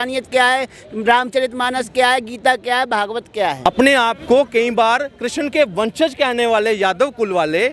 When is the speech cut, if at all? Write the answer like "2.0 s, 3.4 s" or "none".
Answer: 3.7 s